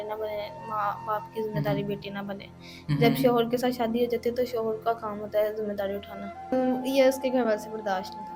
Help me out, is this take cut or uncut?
cut